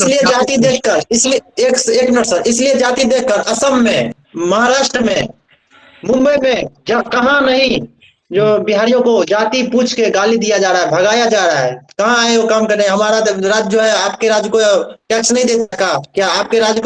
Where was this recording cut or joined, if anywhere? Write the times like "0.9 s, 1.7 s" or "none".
none